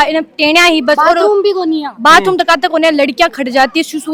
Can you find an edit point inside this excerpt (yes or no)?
no